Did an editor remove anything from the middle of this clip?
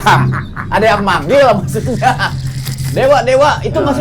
no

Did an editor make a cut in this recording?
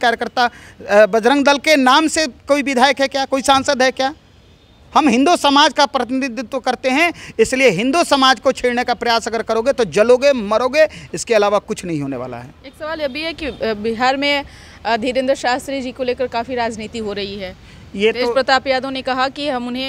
no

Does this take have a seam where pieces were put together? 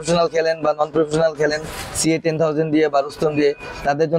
no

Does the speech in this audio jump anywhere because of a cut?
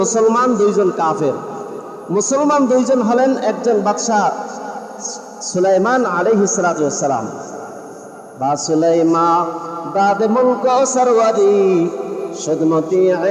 no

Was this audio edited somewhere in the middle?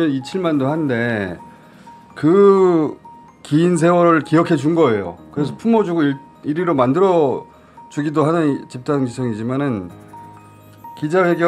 no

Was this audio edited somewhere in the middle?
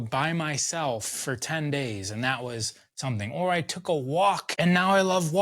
yes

